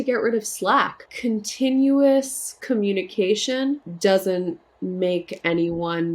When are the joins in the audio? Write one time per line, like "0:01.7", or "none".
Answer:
0:01.0
0:03.9
0:04.7